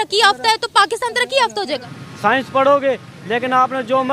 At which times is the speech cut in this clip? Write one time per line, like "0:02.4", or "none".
0:01.8